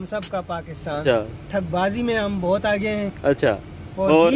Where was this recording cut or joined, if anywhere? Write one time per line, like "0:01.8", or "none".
0:01.0